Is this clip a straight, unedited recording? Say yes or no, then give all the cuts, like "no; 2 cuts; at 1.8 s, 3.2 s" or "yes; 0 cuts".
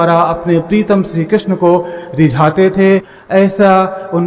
yes; 0 cuts